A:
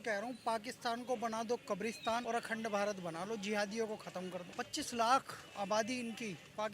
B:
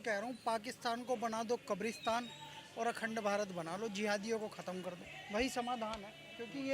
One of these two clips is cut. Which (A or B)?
A